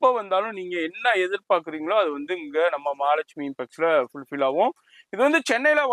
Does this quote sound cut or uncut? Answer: uncut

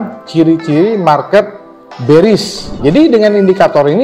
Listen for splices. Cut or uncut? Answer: cut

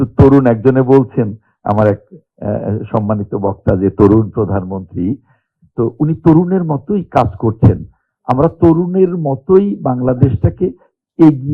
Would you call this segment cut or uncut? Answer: uncut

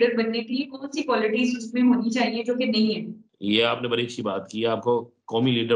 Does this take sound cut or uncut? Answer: uncut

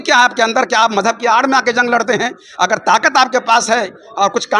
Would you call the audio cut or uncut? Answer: uncut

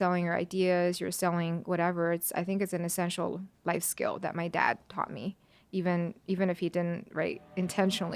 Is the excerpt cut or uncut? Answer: uncut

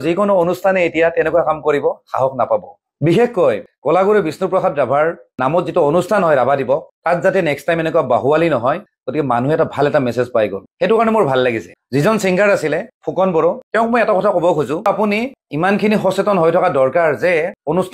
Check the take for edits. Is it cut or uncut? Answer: cut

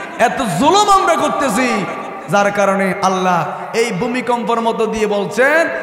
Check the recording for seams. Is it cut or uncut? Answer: uncut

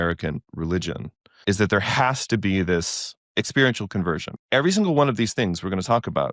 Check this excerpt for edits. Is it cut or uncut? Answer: cut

